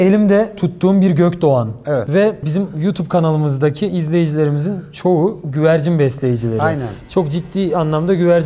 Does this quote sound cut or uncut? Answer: cut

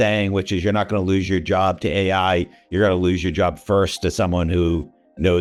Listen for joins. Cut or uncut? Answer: uncut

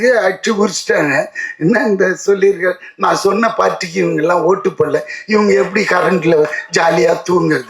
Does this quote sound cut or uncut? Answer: uncut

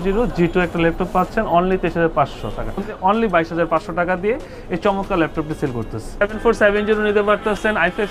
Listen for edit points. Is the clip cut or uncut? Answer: cut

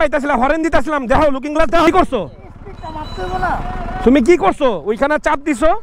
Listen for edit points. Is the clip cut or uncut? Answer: cut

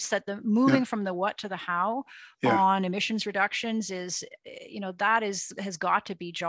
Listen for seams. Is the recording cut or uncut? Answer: uncut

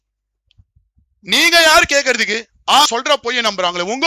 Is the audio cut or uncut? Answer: cut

